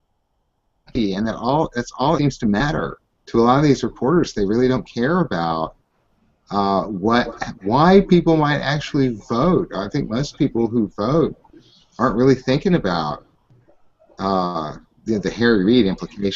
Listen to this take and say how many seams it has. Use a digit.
1